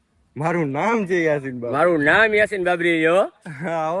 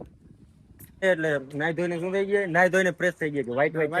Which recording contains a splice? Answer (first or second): second